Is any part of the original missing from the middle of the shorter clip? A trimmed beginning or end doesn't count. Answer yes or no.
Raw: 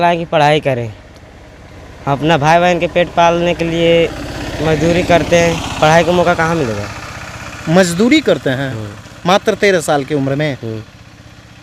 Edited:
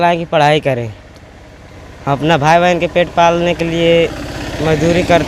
no